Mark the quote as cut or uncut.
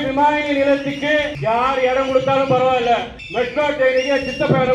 cut